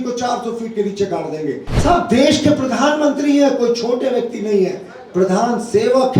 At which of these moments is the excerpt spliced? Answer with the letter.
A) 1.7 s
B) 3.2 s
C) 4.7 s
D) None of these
A